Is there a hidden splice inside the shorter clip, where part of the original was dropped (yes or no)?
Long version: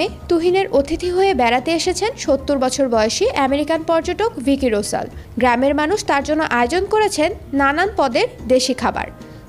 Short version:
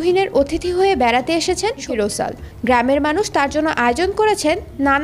yes